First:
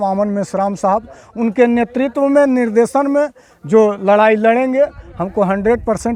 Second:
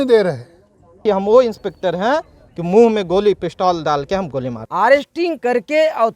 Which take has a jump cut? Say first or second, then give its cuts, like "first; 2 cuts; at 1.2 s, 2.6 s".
second; 2 cuts; at 1.0 s, 4.6 s